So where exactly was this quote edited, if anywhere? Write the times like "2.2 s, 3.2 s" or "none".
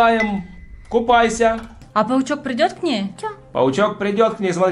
1.7 s